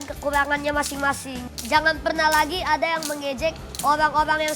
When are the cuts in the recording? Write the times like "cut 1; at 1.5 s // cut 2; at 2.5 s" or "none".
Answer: cut 1; at 3.7 s